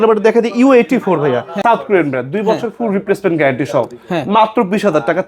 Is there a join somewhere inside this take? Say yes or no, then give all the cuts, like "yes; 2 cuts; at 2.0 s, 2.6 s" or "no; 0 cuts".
yes; 1 cut; at 1.6 s